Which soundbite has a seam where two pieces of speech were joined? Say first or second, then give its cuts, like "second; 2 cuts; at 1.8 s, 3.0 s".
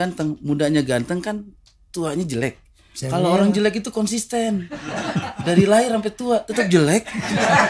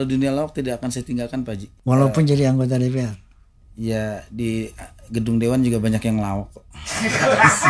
second; 1 cut; at 1.7 s